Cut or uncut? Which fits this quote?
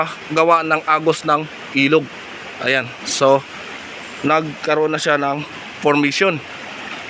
uncut